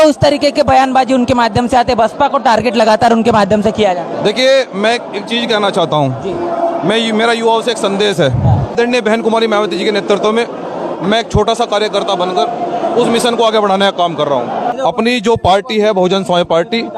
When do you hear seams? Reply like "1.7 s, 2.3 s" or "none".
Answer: 8.8 s, 14.7 s